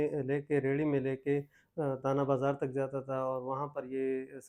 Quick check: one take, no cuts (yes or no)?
yes